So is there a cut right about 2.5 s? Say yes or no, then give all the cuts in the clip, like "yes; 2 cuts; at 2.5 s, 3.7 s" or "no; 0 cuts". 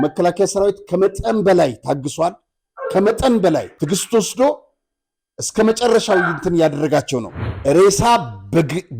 no; 2 cuts; at 3.7 s, 7.3 s